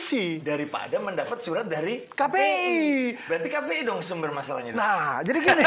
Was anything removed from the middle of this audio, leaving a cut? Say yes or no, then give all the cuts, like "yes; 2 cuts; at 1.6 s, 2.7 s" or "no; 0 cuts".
no; 0 cuts